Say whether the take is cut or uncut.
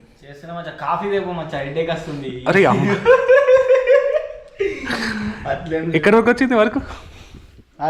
uncut